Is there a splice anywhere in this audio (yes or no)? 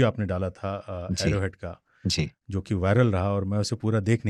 no